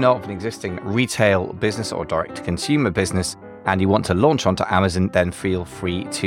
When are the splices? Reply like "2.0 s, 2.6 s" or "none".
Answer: none